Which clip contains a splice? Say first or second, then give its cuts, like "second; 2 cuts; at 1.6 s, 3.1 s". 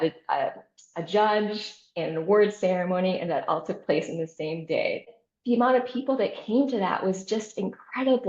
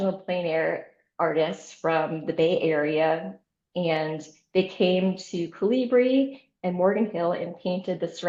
first; 1 cut; at 5.0 s